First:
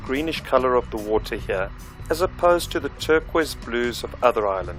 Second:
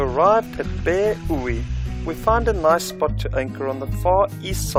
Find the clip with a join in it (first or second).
first